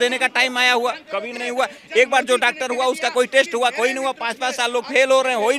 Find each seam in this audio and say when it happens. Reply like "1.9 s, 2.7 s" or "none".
none